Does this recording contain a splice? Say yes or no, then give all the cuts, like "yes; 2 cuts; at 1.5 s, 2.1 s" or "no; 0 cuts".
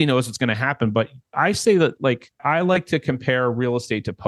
yes; 2 cuts; at 1.2 s, 2.3 s